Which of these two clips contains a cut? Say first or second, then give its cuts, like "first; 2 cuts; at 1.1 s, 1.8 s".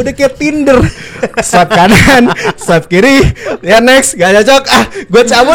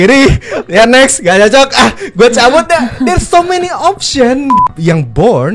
second; 1 cut; at 4.6 s